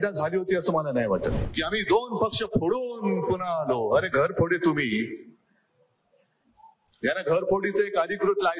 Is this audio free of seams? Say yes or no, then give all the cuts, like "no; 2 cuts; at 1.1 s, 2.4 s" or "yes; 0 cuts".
no; 1 cut; at 1.5 s